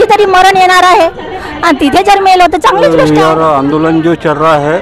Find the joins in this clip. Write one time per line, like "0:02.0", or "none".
0:03.0